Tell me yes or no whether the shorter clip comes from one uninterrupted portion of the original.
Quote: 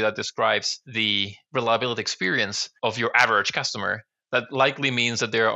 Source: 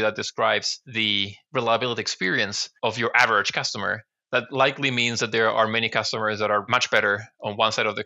yes